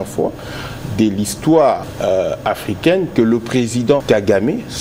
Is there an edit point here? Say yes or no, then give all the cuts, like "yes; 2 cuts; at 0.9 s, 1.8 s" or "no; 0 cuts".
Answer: yes; 2 cuts; at 1.9 s, 4.0 s